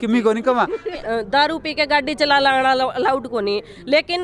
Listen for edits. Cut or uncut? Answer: cut